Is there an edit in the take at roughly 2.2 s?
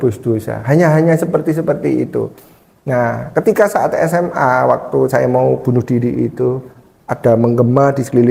no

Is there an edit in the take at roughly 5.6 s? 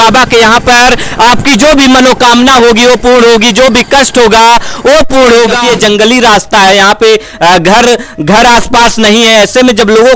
yes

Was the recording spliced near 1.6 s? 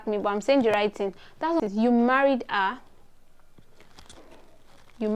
yes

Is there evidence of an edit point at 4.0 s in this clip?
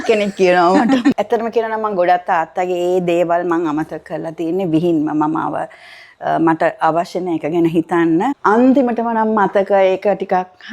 no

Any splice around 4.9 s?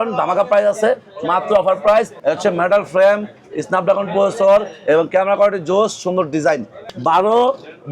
no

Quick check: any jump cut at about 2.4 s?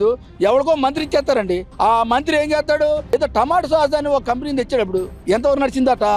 no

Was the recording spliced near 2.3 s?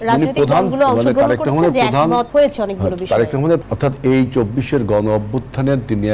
yes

